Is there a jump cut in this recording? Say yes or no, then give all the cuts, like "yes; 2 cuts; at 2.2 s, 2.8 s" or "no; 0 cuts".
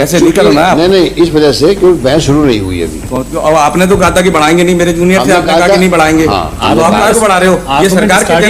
no; 0 cuts